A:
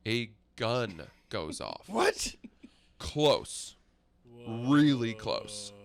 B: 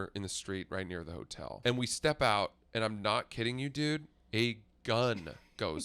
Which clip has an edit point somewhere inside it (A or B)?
B